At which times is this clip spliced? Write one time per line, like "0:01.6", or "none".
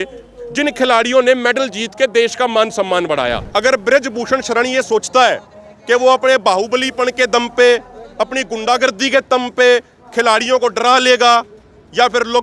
0:03.4